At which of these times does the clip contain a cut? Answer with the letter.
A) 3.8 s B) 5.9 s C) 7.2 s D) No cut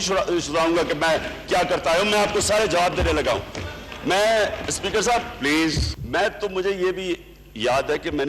B